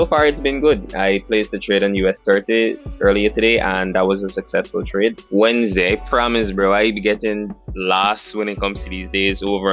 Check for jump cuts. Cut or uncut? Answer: cut